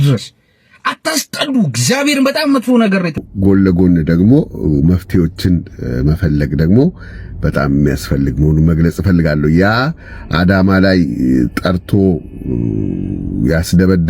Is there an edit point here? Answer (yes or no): yes